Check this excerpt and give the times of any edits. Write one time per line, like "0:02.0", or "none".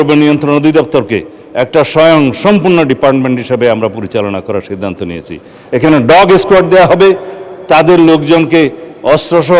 none